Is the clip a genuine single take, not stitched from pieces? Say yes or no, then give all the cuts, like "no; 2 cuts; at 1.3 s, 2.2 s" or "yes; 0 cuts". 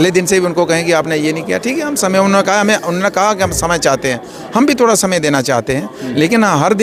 yes; 0 cuts